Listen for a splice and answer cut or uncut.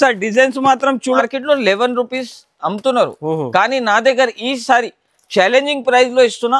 cut